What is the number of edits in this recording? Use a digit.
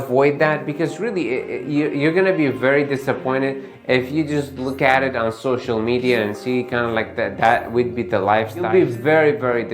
1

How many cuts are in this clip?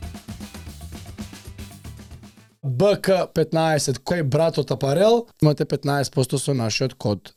0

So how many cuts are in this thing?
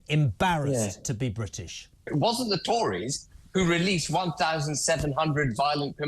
1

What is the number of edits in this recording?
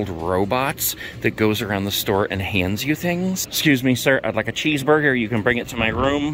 1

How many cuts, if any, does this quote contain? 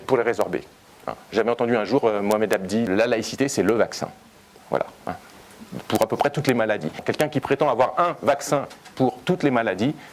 2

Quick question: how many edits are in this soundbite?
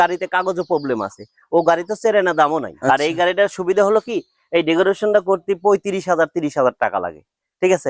1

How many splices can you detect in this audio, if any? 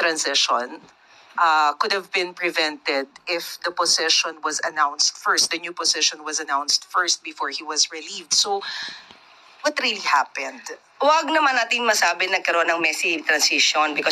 0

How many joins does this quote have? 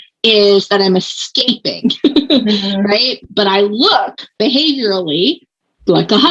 1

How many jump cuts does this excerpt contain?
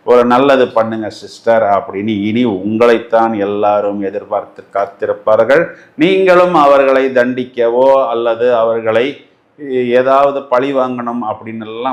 0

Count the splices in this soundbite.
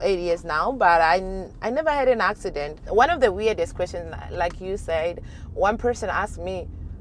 1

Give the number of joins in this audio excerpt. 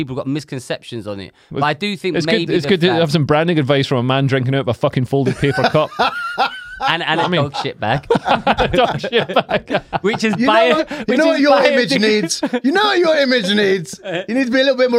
0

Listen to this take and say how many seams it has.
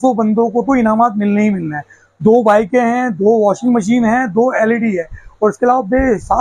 0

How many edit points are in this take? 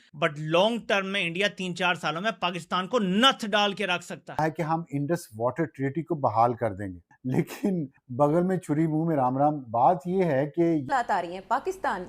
2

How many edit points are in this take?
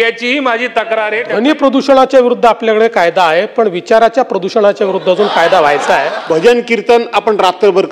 2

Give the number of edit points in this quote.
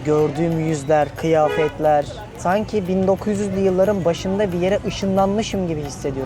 1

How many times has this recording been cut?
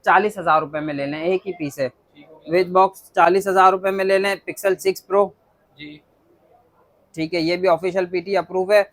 0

